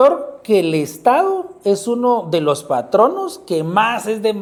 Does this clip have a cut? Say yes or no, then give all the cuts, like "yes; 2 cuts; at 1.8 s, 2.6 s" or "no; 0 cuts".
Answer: no; 0 cuts